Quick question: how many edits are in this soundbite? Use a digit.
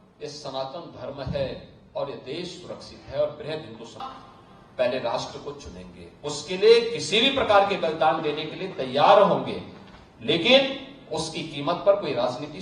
1